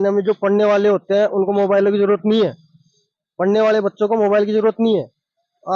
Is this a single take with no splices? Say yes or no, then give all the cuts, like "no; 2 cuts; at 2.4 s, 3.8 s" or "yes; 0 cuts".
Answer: yes; 0 cuts